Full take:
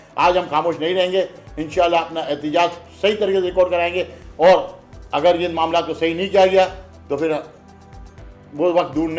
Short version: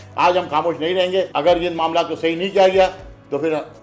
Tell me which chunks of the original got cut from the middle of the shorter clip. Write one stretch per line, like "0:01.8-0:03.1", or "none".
0:01.3-0:05.1